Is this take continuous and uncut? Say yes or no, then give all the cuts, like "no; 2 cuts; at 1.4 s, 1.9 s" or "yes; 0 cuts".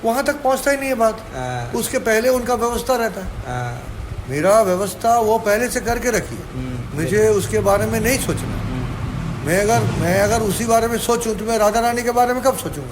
yes; 0 cuts